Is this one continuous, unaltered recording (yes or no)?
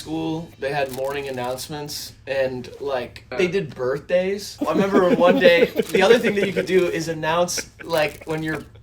no